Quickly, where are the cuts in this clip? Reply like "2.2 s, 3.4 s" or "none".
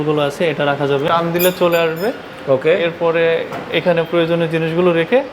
1.1 s